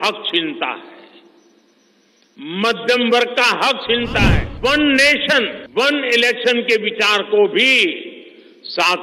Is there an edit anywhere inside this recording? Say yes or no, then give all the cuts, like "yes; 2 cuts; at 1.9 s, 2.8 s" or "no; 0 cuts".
yes; 2 cuts; at 4.4 s, 5.6 s